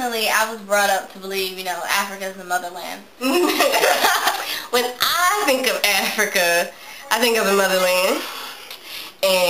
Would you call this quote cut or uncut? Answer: cut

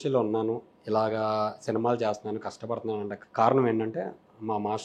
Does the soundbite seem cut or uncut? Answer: cut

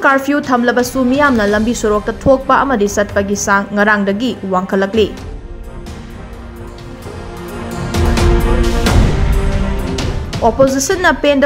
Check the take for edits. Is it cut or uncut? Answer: uncut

